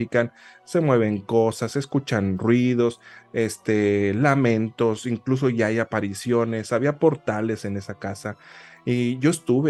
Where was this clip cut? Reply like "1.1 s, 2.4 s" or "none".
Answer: none

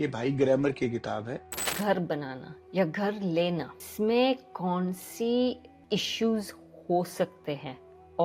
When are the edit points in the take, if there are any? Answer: 1.8 s, 3.9 s, 5.7 s

